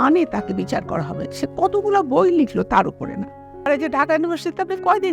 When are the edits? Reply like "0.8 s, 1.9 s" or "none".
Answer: 3.7 s